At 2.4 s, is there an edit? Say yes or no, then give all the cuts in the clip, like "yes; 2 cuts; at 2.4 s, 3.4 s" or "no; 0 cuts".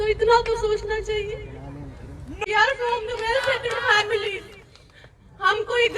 yes; 1 cut; at 2.4 s